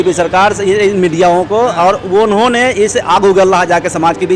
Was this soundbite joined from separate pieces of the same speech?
no; 0 cuts

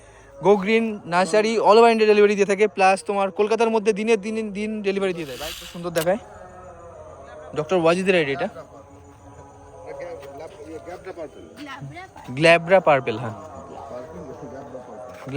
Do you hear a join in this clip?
yes; 1 cut; at 5.3 s

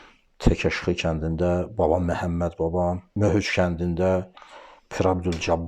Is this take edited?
yes; 1 cut; at 3.1 s

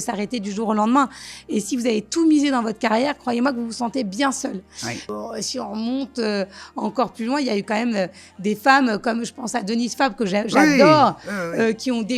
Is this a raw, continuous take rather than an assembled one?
no; 1 cut; at 5.0 s

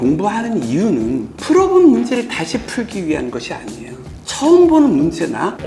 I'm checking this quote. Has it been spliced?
no; 0 cuts

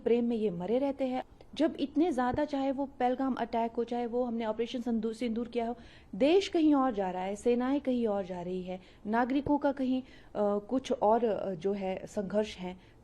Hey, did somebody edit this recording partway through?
yes; 1 cut; at 1.2 s

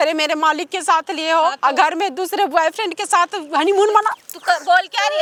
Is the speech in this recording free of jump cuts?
yes; 0 cuts

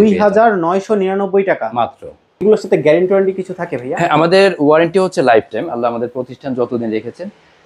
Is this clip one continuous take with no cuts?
no; 1 cut; at 2.4 s

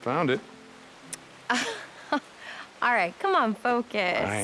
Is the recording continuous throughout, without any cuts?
yes; 0 cuts

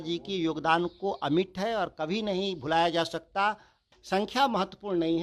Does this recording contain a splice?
yes; 1 cut; at 3.9 s

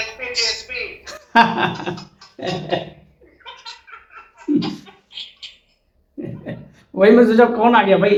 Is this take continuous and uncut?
yes; 0 cuts

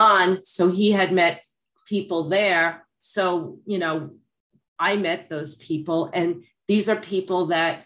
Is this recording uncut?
yes; 0 cuts

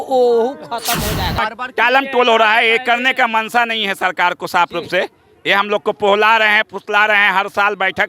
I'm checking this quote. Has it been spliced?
yes; 1 cut; at 1.4 s

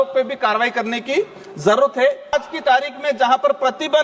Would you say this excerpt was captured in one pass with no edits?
no; 1 cut; at 2.3 s

